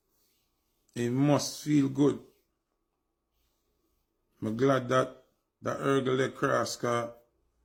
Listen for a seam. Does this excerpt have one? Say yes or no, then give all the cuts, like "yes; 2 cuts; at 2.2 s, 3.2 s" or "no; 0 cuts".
no; 0 cuts